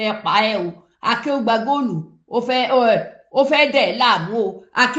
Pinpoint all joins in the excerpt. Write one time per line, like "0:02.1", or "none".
none